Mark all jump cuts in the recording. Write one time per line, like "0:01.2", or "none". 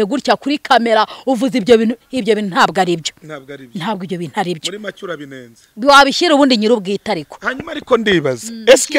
none